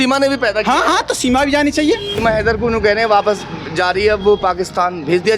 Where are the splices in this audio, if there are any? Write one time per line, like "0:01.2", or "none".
0:02.1